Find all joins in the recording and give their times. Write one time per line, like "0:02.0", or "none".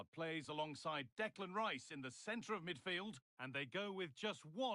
0:03.3